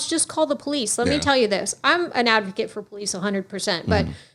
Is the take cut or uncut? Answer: uncut